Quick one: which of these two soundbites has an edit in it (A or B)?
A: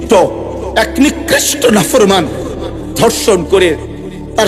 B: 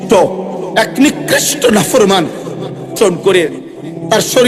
B